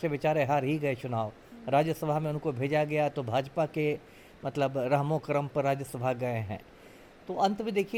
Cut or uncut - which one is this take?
uncut